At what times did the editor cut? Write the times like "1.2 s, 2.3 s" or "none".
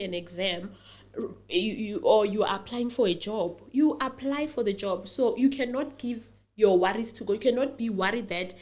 none